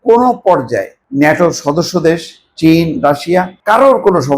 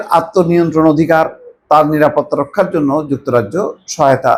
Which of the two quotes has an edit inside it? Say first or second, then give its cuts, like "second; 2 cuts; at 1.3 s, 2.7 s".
first; 2 cuts; at 1.0 s, 3.5 s